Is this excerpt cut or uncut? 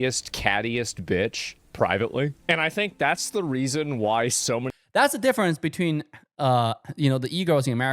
cut